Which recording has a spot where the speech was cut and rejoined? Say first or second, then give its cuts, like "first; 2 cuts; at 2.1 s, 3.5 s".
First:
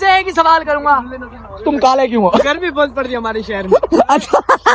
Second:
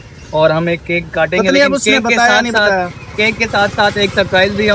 first; 2 cuts; at 2.4 s, 3.8 s